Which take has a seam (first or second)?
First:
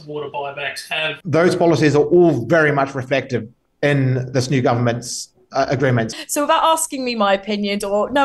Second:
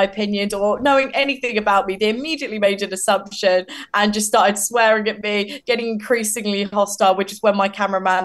first